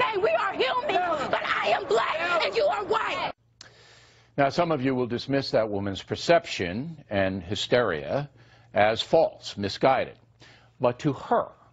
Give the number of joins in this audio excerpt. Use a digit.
1